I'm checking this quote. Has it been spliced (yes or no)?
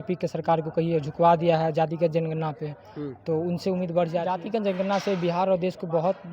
yes